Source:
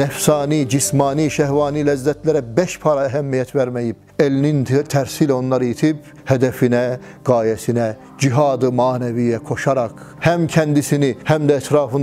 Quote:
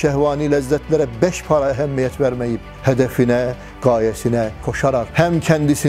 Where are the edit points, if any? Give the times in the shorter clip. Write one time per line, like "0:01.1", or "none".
0:02.7
0:04.8